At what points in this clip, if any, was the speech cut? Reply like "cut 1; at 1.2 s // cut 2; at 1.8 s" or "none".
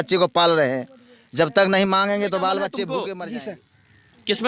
cut 1; at 3.0 s